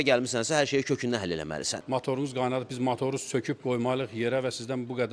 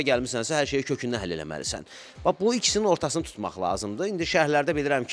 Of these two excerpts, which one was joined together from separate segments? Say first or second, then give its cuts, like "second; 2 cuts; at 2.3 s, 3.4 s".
first; 1 cut; at 1.7 s